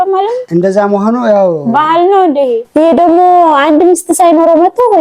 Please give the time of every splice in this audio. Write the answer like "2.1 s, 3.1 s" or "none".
2.6 s

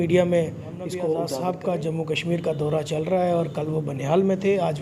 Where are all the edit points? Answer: 1.3 s

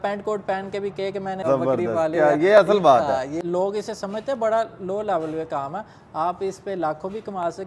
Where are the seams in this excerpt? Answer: 1.4 s, 3.2 s

